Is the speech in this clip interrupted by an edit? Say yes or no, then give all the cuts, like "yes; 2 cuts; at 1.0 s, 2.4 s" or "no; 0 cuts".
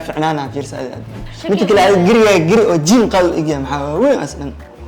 yes; 1 cut; at 1.2 s